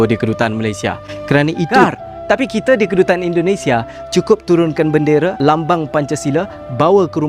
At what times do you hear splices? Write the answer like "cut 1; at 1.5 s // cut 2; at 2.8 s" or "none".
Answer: cut 1; at 1.7 s